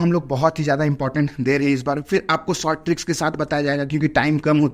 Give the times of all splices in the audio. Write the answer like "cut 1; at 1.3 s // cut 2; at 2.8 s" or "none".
none

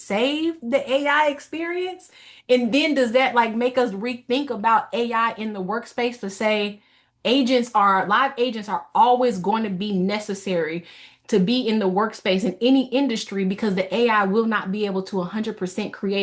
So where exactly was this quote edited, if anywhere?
none

